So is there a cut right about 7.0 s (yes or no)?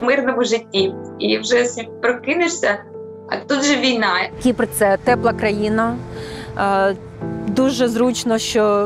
no